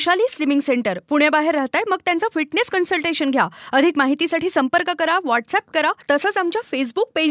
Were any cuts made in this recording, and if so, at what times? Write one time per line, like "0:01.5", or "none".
0:06.0